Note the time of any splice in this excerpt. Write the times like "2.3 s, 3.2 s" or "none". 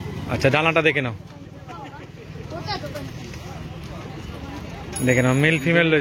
none